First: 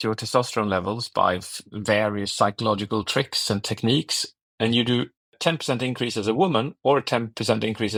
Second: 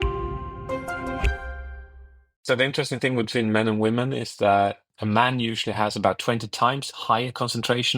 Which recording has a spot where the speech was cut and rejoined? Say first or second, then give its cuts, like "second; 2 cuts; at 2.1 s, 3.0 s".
second; 1 cut; at 2.3 s